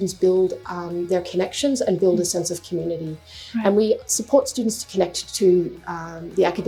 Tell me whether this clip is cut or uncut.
uncut